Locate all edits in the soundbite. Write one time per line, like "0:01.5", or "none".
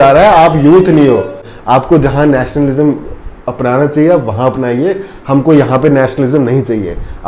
0:01.5